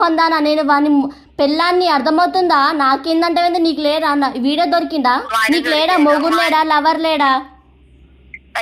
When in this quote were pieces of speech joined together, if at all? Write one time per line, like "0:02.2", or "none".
0:05.3